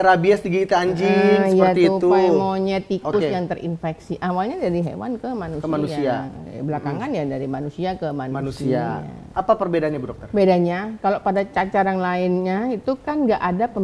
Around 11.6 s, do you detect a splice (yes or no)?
no